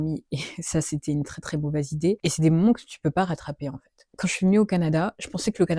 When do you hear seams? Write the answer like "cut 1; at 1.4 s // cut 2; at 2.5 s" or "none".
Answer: cut 1; at 2.2 s // cut 2; at 4.1 s